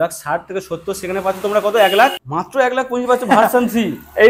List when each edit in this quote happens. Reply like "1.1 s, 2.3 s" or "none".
2.2 s

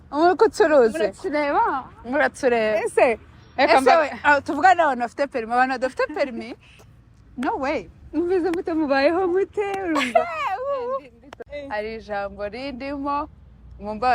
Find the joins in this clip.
11.4 s

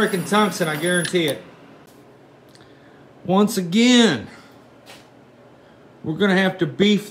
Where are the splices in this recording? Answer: 1.9 s

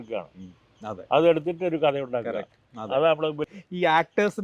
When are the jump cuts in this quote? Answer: 3.4 s

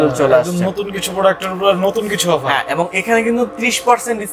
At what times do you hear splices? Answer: none

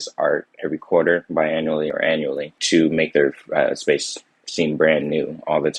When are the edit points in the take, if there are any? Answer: 2.6 s

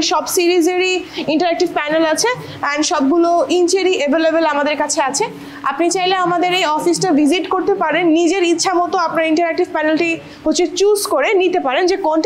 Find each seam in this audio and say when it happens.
none

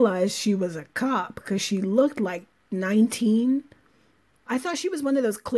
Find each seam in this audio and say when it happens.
4.4 s

